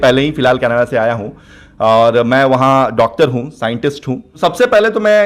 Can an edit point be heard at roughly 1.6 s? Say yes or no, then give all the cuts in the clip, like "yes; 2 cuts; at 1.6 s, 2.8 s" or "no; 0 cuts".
no; 1 cut; at 4.3 s